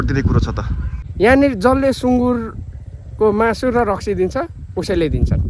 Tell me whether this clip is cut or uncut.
uncut